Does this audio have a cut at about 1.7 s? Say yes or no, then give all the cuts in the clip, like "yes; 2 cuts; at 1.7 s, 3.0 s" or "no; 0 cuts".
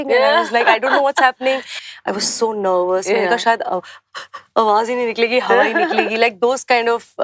yes; 1 cut; at 1.7 s